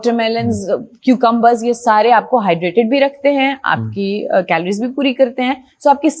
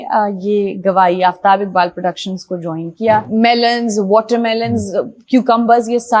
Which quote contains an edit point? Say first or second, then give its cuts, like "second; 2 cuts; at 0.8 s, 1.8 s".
second; 1 cut; at 3.3 s